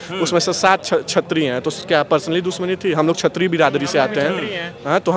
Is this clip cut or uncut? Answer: uncut